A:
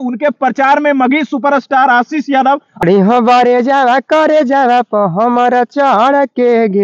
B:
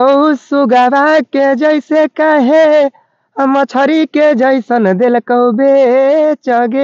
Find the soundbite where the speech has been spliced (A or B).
A